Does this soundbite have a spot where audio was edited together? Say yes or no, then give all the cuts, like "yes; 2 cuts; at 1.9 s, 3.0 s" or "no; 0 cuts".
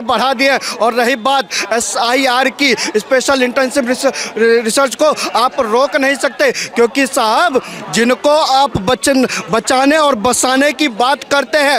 no; 0 cuts